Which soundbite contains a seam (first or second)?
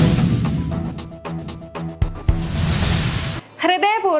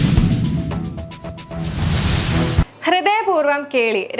second